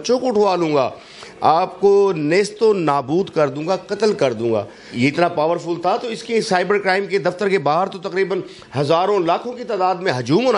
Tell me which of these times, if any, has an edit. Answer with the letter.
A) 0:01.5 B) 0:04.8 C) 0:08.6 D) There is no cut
B